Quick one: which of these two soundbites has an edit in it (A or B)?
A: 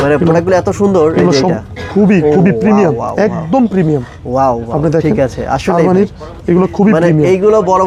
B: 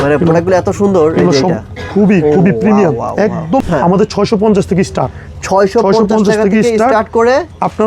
B